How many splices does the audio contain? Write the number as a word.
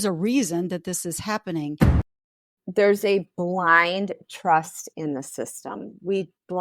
one